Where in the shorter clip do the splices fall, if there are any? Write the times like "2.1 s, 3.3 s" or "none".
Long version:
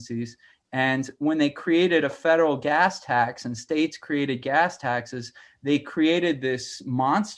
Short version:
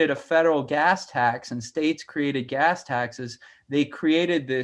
none